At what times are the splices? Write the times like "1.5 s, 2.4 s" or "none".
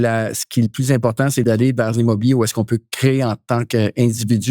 1.4 s